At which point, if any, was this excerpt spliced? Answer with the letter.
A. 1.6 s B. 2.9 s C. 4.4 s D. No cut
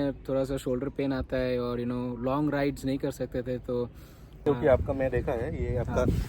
C